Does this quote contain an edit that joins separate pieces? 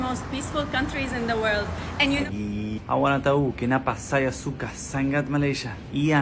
yes; 1 cut; at 2.3 s

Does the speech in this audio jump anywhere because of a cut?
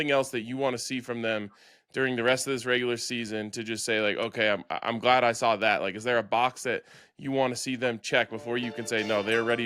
no; 0 cuts

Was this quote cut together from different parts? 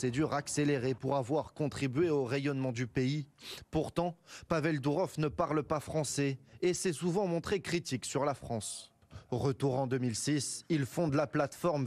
yes; 1 cut; at 3.9 s

